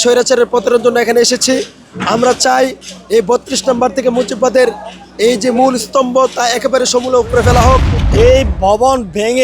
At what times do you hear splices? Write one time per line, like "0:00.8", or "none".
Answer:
0:08.0